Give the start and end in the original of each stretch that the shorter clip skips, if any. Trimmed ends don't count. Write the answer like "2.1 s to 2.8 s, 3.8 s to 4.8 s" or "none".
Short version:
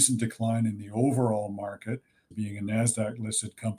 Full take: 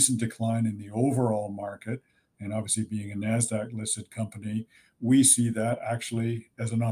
2.3 s to 2.9 s